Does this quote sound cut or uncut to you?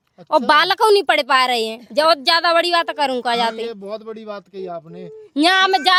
uncut